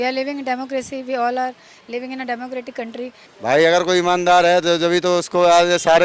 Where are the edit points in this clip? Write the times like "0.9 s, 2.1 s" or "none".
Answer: 3.2 s